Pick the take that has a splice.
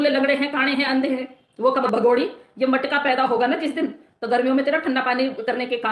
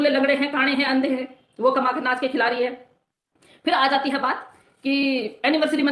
first; 1 cut; at 1.8 s

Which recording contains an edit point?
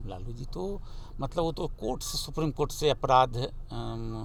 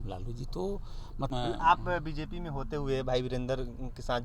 second; 1 cut; at 1.3 s

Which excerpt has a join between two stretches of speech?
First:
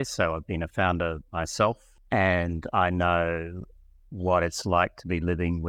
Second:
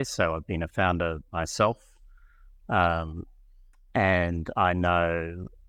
first; 1 cut; at 1.9 s

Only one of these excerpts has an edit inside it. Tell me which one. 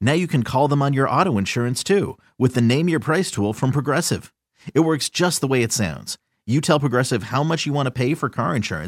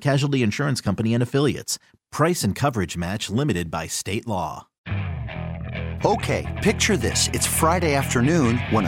second; 1 cut; at 4.7 s

